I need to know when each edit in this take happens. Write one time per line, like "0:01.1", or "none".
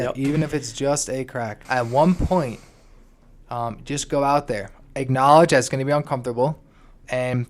0:01.6